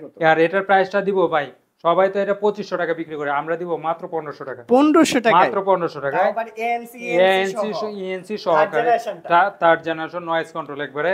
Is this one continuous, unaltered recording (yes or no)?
yes